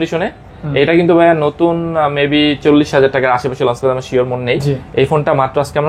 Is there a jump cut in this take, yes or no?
no